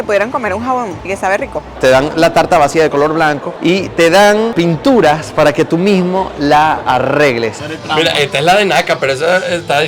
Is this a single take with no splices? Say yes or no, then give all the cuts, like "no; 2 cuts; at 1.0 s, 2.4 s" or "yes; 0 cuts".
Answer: no; 3 cuts; at 1.5 s, 4.5 s, 7.6 s